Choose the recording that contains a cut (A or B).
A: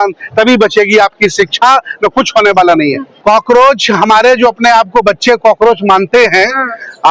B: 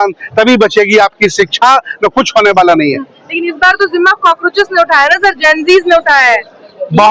A